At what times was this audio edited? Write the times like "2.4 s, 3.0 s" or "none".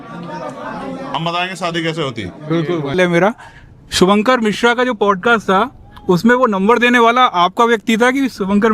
2.9 s